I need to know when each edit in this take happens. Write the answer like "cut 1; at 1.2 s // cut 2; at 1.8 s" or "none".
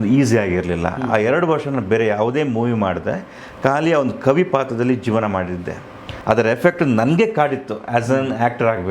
cut 1; at 6.1 s